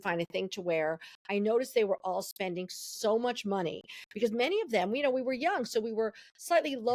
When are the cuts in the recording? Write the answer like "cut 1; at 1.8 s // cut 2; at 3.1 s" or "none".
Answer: none